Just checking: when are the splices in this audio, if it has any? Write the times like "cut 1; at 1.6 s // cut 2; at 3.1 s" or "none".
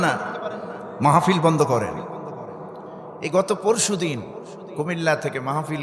cut 1; at 2.8 s